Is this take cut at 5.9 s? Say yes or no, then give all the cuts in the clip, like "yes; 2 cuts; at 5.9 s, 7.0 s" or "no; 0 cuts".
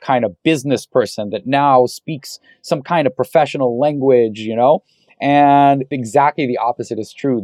yes; 1 cut; at 5.9 s